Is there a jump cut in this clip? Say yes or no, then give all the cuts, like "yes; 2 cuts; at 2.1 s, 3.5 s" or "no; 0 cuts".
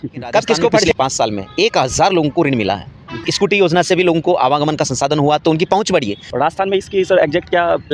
yes; 3 cuts; at 0.9 s, 3.3 s, 6.2 s